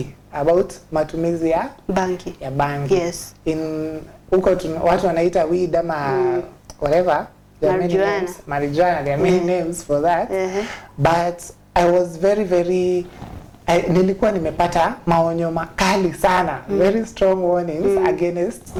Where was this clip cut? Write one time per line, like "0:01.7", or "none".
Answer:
none

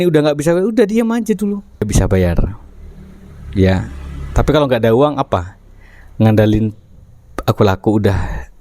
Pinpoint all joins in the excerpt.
0:01.9

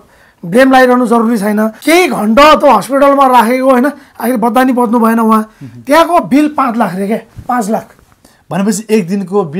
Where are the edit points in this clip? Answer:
0:01.8

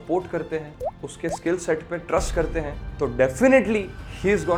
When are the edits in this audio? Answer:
none

